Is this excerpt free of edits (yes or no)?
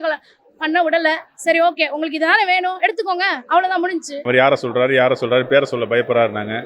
no